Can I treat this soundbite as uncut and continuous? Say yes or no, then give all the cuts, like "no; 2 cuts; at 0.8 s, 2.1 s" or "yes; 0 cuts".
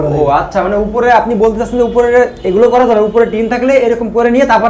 yes; 0 cuts